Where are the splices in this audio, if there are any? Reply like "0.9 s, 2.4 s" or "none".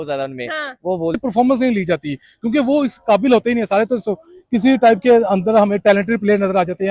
1.2 s